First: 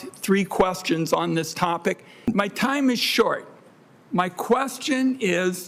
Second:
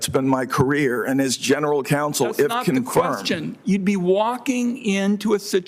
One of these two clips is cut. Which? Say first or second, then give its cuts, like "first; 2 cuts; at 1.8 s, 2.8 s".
first; 1 cut; at 2.3 s